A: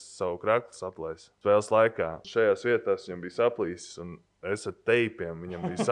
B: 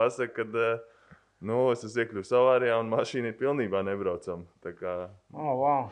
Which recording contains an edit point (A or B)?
A